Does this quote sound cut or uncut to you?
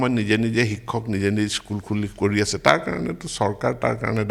uncut